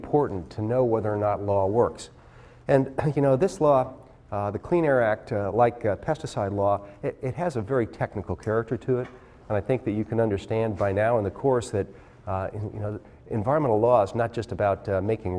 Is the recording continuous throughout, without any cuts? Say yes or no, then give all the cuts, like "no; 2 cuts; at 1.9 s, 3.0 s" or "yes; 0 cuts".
no; 1 cut; at 1.5 s